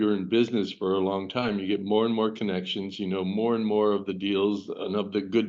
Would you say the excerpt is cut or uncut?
uncut